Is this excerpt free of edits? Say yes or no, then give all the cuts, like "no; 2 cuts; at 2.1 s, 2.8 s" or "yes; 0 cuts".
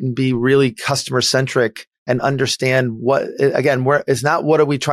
yes; 0 cuts